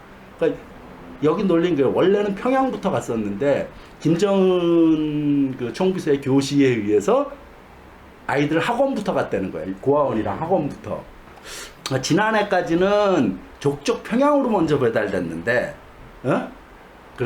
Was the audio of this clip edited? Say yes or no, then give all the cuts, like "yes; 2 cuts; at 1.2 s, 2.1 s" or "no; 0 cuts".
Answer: no; 0 cuts